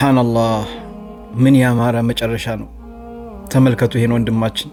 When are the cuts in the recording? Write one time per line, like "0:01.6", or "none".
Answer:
none